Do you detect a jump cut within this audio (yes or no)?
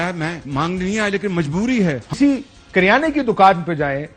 yes